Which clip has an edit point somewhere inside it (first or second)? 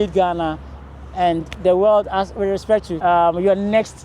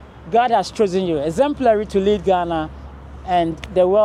first